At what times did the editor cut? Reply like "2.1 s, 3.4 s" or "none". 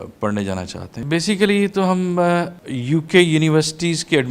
0.9 s, 2.6 s

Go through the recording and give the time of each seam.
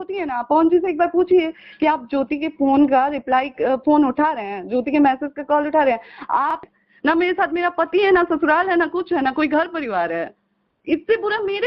6.6 s

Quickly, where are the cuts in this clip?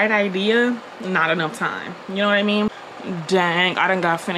none

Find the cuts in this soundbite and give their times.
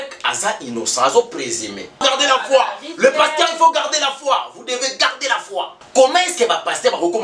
2.0 s, 5.8 s

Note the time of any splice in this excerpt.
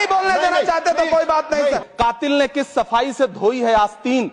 1.9 s

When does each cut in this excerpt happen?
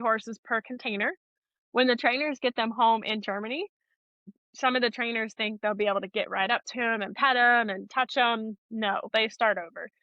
1.3 s, 4.2 s, 9.1 s

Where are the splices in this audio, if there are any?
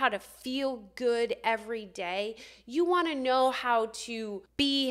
none

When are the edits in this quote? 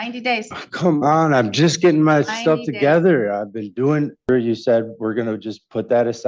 4.3 s

